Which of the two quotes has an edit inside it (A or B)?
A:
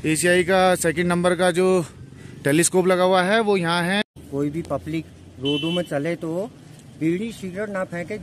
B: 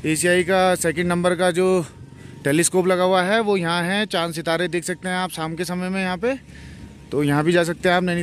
A